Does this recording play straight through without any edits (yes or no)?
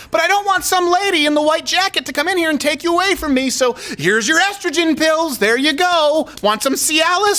yes